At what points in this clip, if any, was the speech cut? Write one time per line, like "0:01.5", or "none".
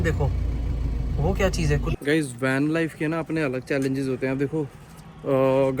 0:01.9

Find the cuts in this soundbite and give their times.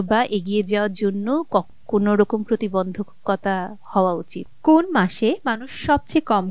0:04.5

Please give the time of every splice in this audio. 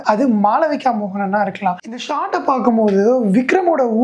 0:01.8

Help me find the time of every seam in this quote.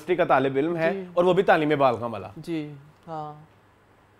none

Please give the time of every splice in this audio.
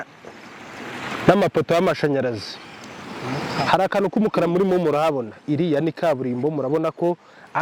none

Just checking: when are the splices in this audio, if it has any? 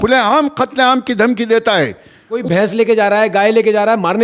0:02.4

